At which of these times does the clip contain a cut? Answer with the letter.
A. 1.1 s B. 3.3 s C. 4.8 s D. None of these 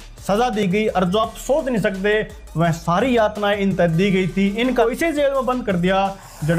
C